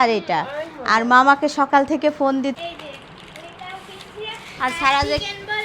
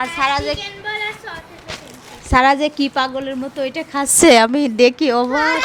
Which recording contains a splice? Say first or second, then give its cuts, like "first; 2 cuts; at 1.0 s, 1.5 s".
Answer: first; 1 cut; at 2.6 s